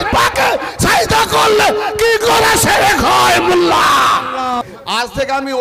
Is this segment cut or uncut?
cut